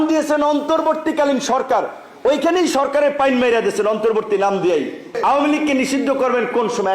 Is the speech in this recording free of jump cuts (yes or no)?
no